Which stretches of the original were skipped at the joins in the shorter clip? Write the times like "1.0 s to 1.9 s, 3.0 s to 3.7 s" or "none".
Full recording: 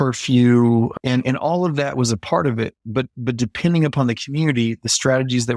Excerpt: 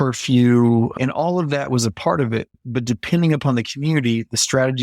1.0 s to 1.2 s, 2.9 s to 3.1 s